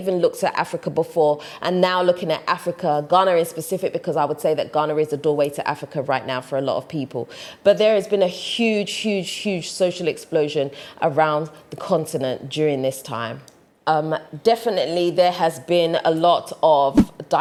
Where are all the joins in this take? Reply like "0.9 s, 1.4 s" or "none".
none